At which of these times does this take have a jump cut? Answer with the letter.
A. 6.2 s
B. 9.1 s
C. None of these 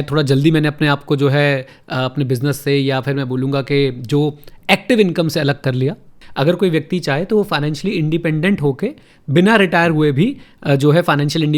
A